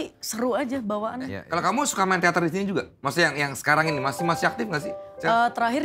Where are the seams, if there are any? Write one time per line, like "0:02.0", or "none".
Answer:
0:01.4